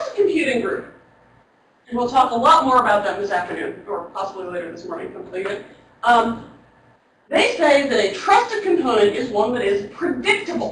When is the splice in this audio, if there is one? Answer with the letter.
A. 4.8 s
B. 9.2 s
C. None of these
B